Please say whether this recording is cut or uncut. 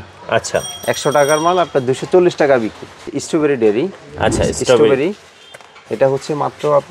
cut